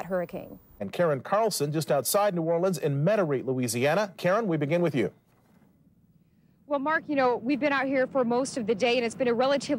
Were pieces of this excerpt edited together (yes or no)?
yes